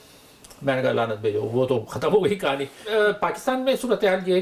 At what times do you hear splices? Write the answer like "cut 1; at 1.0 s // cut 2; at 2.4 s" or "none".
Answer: cut 1; at 2.8 s